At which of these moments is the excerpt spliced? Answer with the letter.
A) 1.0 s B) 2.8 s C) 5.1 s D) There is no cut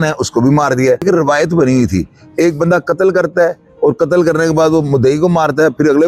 A